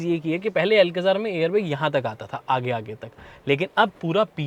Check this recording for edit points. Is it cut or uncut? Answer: uncut